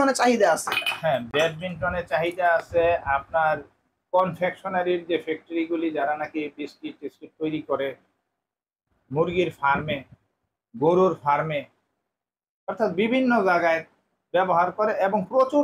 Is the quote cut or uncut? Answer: uncut